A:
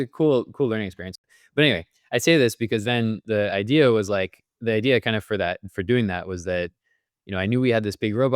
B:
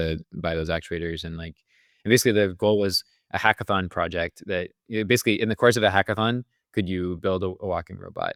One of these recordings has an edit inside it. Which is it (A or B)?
A